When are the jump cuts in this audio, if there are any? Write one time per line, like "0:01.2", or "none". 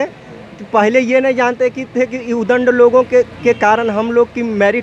none